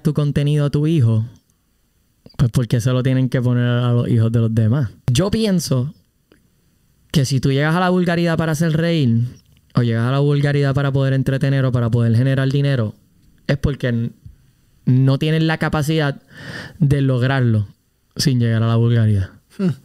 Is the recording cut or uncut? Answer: cut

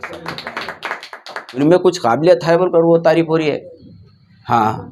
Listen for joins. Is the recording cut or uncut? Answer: cut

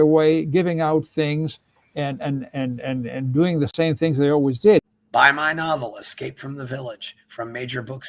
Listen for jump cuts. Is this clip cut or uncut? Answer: cut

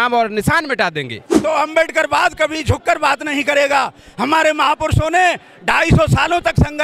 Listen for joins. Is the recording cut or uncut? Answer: cut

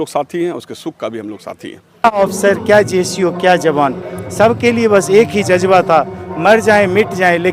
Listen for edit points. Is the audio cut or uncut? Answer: cut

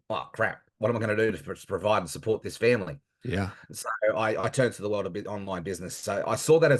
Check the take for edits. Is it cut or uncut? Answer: uncut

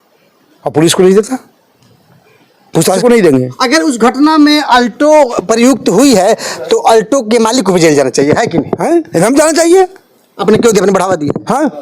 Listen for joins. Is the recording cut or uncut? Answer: cut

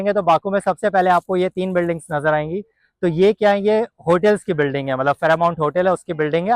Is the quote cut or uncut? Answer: uncut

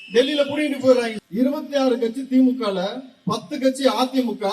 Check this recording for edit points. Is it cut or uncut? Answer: cut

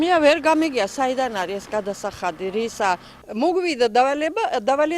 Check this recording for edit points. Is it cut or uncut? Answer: cut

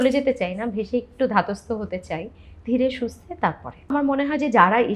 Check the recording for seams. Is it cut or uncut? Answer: cut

